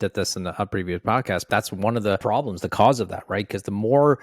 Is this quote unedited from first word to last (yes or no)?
no